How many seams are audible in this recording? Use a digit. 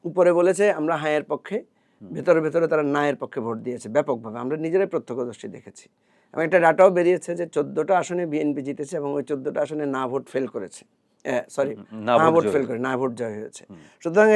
0